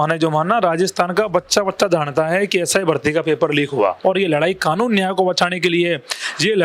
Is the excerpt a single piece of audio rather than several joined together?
no; 1 cut; at 4.0 s

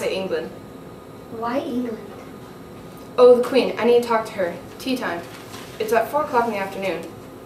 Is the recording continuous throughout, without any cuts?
yes; 0 cuts

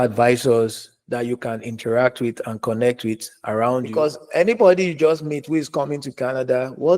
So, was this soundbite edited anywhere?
yes; 1 cut; at 3.9 s

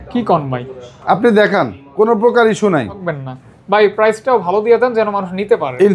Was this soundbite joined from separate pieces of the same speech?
yes; 1 cut; at 3.0 s

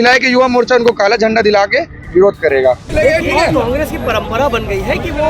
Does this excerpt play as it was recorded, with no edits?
no; 1 cut; at 2.8 s

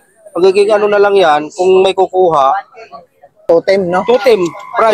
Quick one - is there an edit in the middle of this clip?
yes; 1 cut; at 3.4 s

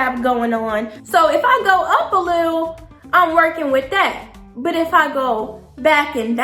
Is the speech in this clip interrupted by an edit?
yes; 1 cut; at 1.0 s

